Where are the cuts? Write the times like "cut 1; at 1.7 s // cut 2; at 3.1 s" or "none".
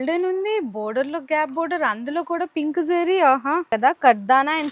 cut 1; at 3.7 s